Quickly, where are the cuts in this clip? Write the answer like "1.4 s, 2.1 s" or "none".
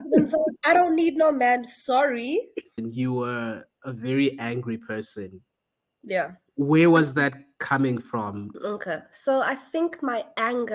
2.8 s, 8.5 s